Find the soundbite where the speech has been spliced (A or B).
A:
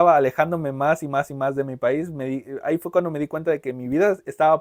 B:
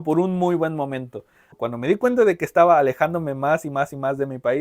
B